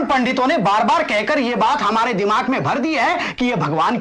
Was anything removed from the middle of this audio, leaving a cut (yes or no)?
no